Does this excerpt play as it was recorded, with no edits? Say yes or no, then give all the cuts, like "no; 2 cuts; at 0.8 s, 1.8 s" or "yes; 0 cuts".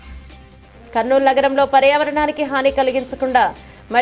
no; 1 cut; at 0.9 s